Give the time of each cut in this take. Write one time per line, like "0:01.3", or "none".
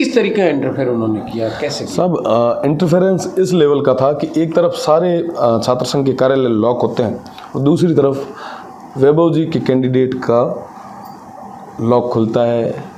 none

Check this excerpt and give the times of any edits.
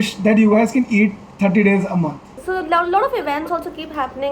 0:02.4

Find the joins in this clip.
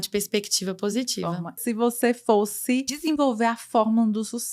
0:01.6
0:02.9

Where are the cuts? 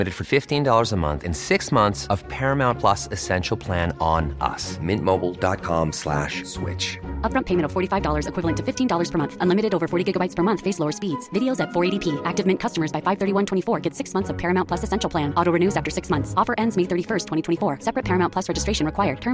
none

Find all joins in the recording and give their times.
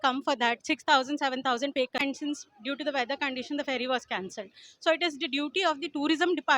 0:02.0

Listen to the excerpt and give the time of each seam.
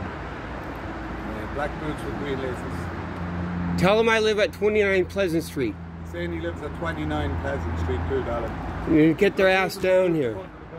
none

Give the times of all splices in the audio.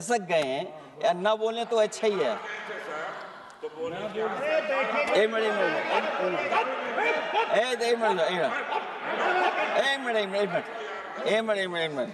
none

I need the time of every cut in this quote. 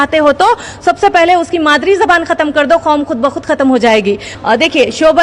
0:04.3

